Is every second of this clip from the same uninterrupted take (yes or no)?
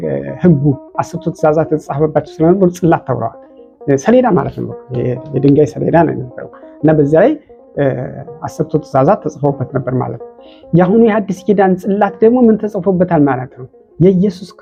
yes